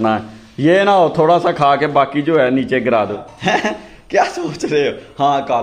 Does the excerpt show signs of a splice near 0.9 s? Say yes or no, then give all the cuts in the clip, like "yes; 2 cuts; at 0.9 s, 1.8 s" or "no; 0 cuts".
no; 1 cut; at 3.2 s